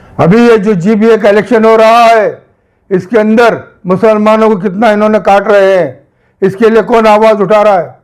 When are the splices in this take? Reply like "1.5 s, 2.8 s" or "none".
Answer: none